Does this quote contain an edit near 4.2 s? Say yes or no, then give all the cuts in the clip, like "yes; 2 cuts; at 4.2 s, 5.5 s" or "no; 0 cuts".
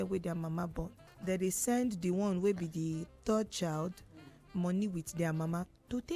no; 1 cut; at 1.1 s